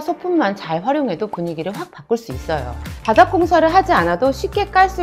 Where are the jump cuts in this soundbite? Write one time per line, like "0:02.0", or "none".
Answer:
0:02.9